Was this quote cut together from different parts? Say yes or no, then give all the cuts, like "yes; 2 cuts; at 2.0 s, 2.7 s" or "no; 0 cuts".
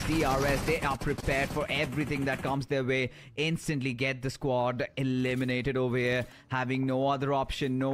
no; 0 cuts